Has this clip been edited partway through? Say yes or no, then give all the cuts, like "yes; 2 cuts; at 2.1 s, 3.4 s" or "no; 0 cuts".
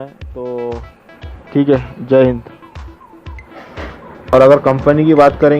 yes; 1 cut; at 4.3 s